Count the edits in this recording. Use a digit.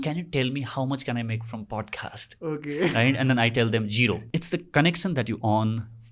1